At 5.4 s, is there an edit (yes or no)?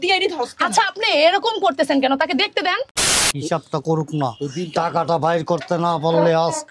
no